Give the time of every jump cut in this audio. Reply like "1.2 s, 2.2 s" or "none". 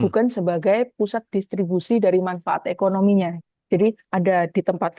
3.3 s